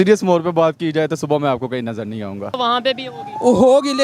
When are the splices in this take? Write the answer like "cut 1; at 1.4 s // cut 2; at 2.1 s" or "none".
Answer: cut 1; at 2.6 s